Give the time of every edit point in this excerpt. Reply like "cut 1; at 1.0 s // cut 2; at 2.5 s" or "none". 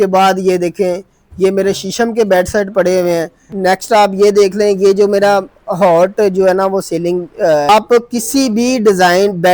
cut 1; at 3.4 s // cut 2; at 7.7 s